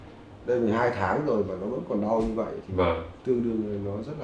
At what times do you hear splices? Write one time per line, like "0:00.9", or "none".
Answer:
0:03.2

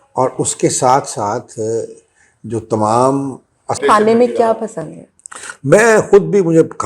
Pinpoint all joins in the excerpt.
0:03.8

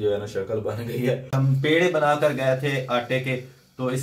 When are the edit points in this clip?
0:01.4

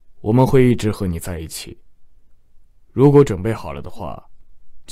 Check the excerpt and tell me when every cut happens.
none

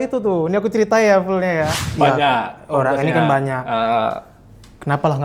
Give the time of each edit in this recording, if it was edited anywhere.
0:01.8

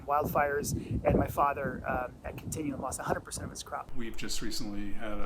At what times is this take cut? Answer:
0:03.9

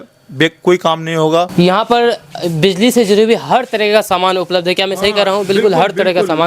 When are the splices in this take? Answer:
0:01.5

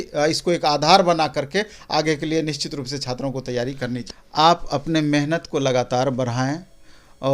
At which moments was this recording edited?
0:04.0

